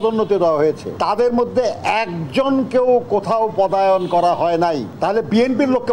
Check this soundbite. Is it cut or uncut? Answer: cut